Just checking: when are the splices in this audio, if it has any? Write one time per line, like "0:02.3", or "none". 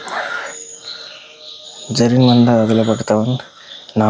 none